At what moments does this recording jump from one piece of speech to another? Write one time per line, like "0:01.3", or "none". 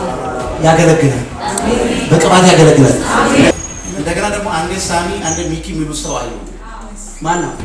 0:03.5